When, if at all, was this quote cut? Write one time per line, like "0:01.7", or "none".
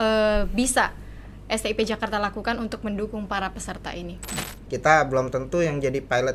0:04.4